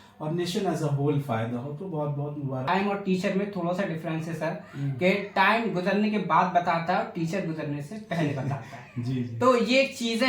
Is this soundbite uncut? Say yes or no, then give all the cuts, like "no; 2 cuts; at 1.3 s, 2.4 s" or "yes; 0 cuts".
no; 1 cut; at 2.7 s